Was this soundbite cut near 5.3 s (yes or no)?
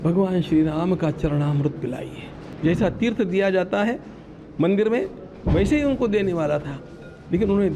no